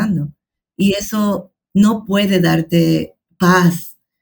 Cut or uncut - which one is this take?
cut